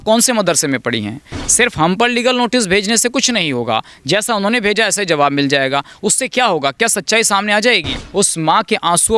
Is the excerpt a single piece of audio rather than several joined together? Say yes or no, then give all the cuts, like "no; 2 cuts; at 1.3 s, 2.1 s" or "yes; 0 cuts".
no; 2 cuts; at 1.3 s, 8.0 s